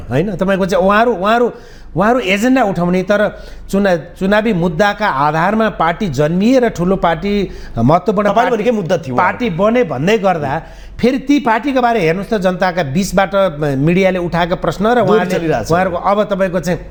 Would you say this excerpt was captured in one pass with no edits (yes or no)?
yes